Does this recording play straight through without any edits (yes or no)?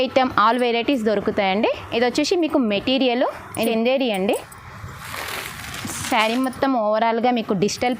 no